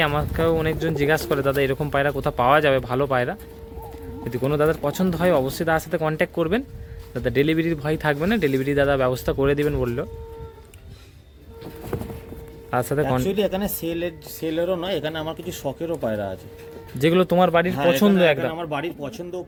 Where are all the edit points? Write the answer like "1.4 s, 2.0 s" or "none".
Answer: none